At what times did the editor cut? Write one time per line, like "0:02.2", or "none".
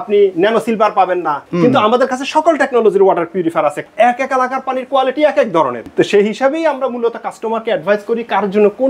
0:01.5
0:03.8
0:05.8